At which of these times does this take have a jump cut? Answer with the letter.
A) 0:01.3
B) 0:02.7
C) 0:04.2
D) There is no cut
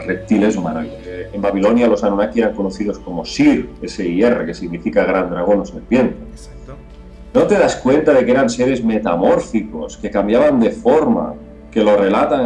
A